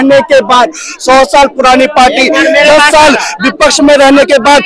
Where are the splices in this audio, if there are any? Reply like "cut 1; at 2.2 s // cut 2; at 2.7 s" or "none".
none